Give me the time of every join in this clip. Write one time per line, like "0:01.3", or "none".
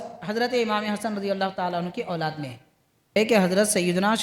0:03.2